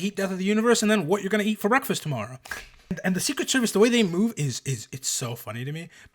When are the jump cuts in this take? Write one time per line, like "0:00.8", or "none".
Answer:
0:03.0